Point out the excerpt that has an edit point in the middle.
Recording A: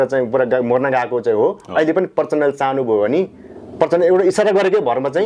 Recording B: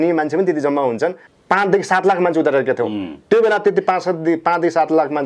B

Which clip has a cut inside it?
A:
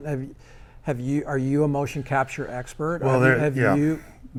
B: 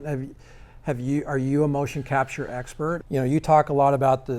B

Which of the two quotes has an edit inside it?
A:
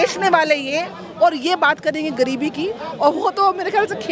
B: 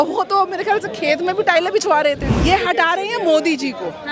B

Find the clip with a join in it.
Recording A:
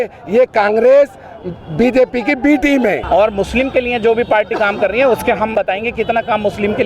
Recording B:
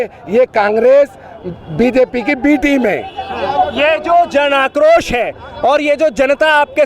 A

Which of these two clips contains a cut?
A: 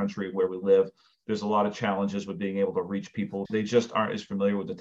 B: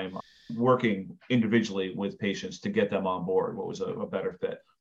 A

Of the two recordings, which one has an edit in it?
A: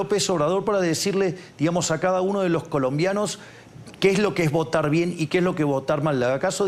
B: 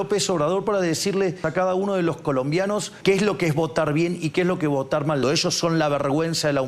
B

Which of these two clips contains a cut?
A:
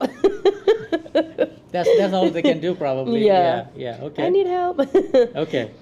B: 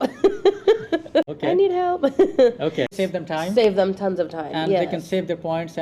B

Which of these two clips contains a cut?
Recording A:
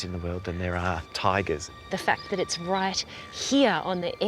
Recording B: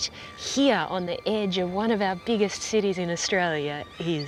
A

